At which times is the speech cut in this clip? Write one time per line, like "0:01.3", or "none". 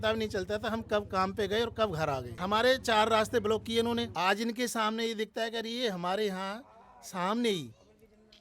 0:02.3
0:04.1